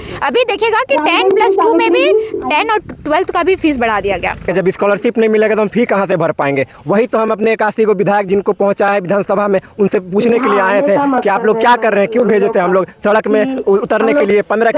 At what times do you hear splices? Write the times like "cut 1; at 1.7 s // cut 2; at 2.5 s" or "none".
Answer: cut 1; at 4.5 s